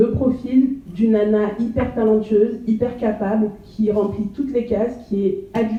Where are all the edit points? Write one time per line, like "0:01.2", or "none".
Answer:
none